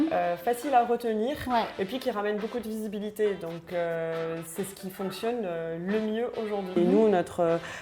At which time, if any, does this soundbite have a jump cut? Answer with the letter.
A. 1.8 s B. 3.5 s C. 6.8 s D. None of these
C